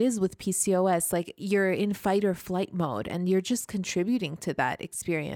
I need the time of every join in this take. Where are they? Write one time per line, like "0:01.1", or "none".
0:01.3